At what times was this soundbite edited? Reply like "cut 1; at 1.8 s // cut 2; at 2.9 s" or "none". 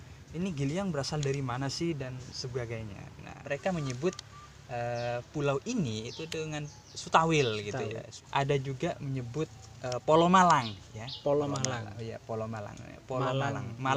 cut 1; at 3.4 s // cut 2; at 8.1 s